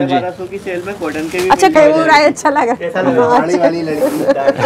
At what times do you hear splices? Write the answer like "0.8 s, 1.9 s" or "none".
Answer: 1.7 s